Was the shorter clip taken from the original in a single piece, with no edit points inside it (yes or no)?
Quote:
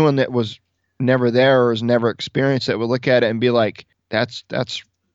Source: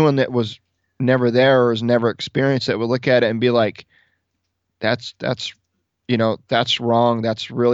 no